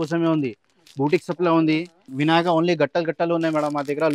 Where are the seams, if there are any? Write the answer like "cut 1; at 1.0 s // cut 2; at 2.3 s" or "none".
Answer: cut 1; at 2.1 s